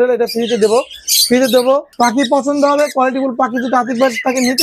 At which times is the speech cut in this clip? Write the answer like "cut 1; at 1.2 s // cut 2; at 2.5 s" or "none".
cut 1; at 1.9 s